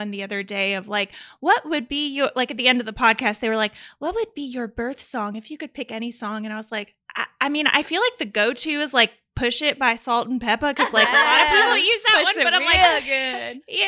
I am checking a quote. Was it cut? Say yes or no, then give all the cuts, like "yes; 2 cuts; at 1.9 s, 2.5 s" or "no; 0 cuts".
no; 0 cuts